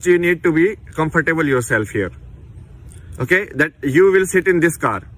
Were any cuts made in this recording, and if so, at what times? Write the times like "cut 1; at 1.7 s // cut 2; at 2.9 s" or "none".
none